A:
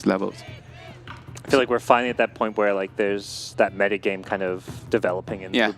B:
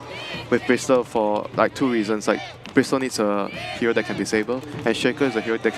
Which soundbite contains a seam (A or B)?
B